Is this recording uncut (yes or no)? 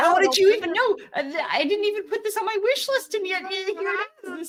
yes